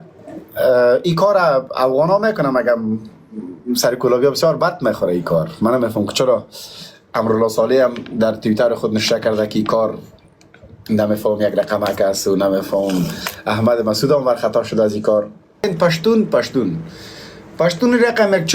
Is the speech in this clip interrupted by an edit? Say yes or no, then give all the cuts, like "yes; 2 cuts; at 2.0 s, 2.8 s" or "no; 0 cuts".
yes; 1 cut; at 15.6 s